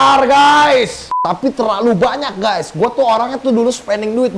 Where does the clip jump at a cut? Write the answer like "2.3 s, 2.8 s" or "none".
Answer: 1.2 s